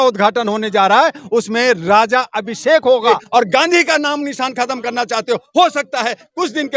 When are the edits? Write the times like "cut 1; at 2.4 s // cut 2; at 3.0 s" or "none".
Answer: cut 1; at 3.2 s